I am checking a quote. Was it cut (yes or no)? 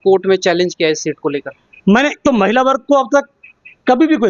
yes